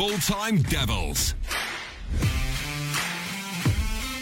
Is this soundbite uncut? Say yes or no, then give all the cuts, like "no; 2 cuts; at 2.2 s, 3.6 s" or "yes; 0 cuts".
no; 1 cut; at 3.0 s